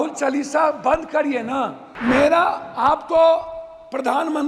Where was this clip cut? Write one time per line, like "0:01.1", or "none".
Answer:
0:01.9